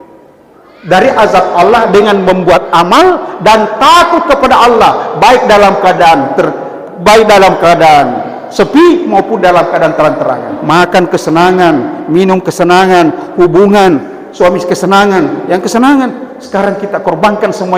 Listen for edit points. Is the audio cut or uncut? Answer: cut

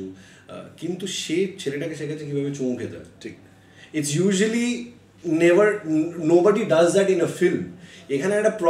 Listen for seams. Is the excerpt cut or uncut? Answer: uncut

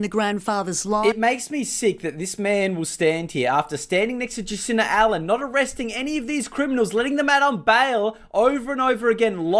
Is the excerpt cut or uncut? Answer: cut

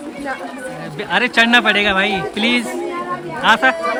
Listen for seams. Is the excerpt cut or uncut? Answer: uncut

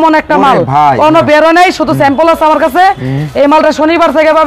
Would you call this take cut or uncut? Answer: uncut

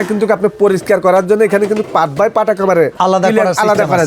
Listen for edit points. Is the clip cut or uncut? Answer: cut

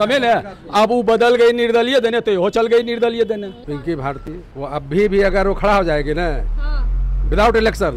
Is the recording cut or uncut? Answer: cut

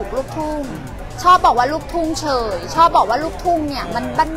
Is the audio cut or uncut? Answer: uncut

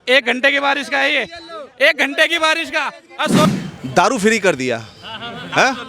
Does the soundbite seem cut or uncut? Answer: cut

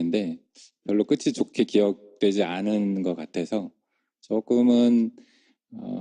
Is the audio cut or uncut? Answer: cut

